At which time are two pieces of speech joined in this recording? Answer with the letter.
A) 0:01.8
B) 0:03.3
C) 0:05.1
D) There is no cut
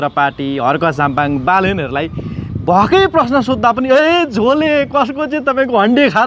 D